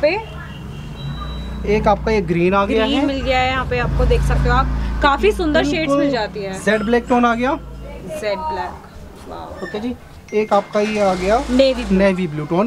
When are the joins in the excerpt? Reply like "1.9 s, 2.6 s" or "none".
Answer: none